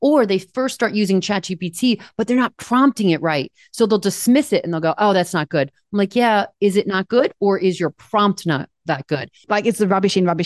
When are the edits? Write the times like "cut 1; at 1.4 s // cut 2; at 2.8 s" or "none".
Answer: cut 1; at 9.3 s